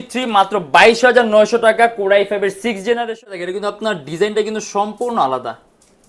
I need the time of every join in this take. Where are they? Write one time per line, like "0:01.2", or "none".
0:03.4